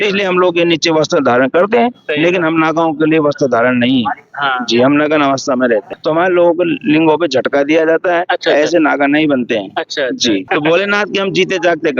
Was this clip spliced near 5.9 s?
yes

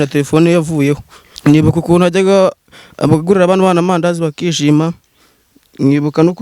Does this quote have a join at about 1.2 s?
yes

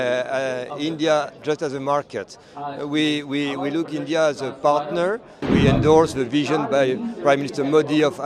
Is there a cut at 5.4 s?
yes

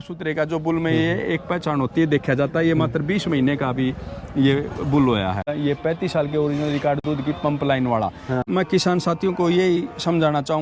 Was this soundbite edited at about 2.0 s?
no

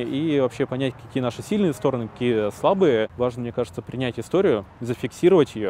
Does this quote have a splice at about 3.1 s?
yes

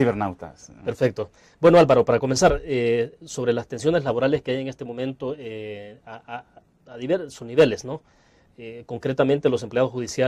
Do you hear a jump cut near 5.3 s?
no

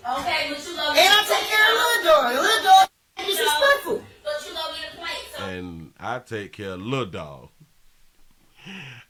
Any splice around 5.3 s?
no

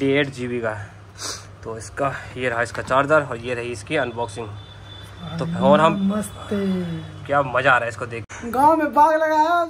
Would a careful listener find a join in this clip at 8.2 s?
yes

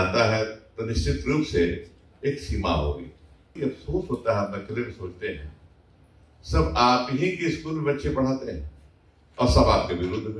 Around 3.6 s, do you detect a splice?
yes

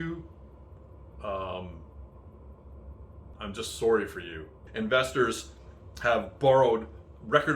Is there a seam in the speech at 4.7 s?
yes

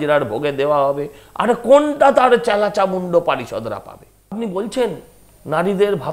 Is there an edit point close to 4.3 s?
yes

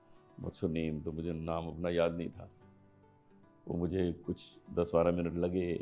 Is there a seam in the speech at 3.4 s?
no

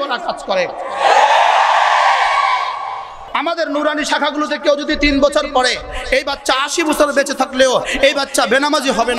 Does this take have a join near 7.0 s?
no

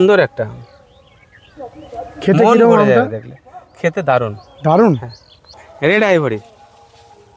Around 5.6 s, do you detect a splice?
yes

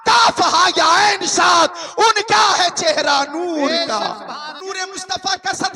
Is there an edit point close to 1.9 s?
no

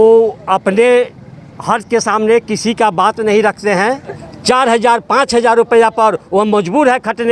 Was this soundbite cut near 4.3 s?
yes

